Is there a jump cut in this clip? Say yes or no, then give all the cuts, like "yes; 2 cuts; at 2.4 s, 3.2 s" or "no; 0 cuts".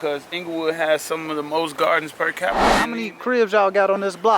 yes; 1 cut; at 2.9 s